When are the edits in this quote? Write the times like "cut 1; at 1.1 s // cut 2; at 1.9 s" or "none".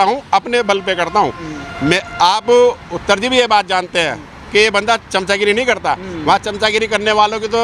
none